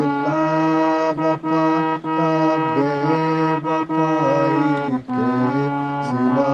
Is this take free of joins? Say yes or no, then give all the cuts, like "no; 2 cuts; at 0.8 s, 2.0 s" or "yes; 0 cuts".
yes; 0 cuts